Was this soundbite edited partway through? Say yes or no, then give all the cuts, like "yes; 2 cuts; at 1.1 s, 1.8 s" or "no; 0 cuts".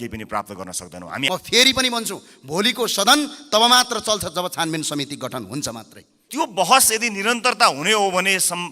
yes; 2 cuts; at 1.3 s, 6.1 s